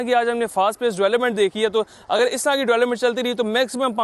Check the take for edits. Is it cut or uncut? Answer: uncut